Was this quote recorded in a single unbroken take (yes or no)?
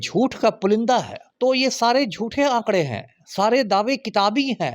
no